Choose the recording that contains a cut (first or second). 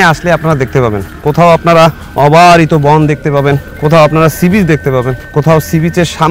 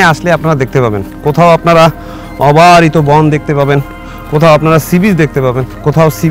first